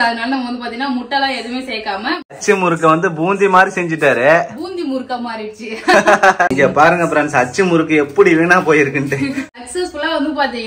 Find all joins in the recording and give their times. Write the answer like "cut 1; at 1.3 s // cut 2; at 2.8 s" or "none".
cut 1; at 2.4 s // cut 2; at 6.5 s // cut 3; at 9.7 s